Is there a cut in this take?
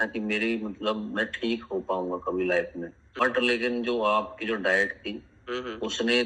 yes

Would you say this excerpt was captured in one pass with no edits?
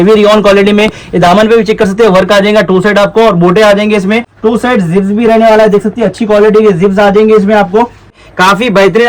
no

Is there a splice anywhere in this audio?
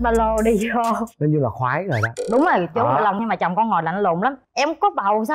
yes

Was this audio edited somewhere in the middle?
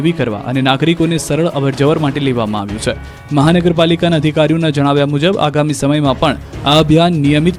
no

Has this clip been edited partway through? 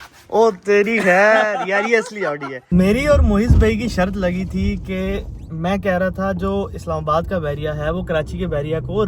yes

